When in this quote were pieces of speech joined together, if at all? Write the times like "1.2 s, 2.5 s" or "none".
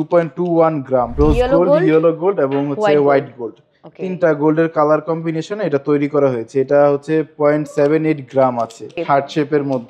1.2 s, 8.9 s